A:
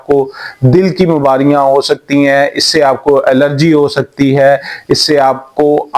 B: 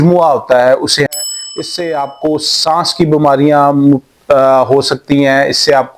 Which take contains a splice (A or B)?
B